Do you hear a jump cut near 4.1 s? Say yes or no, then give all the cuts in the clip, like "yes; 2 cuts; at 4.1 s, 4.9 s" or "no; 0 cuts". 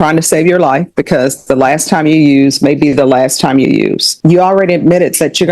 yes; 1 cut; at 4.1 s